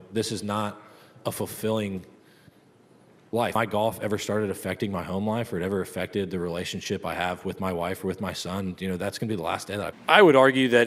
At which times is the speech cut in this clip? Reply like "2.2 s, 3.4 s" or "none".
3.5 s, 10.0 s